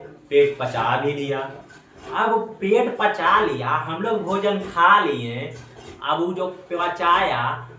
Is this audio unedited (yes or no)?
yes